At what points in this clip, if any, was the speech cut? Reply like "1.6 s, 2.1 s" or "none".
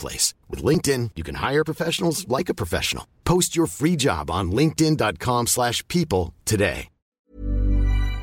7.3 s